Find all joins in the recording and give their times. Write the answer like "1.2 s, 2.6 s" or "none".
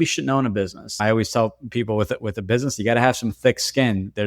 1.0 s